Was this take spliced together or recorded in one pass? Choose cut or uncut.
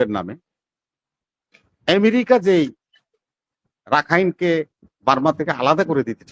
uncut